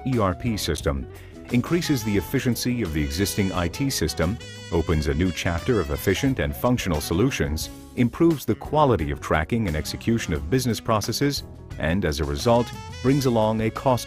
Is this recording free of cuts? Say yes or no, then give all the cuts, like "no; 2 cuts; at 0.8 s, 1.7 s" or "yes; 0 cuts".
yes; 0 cuts